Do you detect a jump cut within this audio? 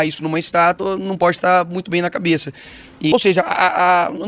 yes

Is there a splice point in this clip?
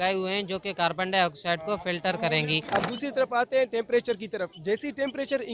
yes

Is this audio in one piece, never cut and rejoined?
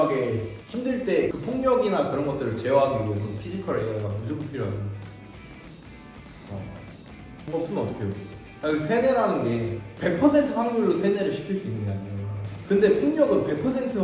yes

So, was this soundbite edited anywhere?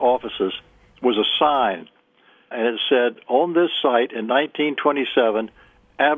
yes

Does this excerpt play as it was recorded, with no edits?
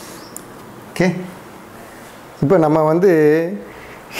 yes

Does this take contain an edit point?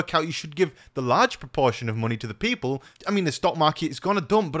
yes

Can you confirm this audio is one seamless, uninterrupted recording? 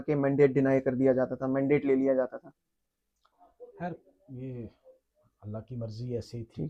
yes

